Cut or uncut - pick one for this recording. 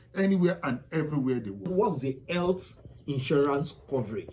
cut